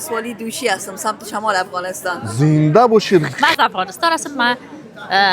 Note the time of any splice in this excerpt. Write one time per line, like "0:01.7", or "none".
0:03.3